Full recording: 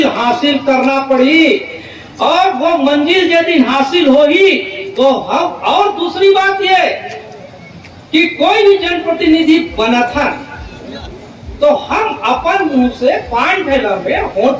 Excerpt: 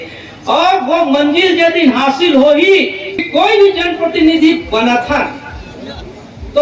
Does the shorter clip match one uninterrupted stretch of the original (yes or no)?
no